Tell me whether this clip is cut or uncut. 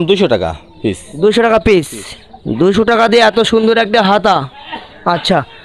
uncut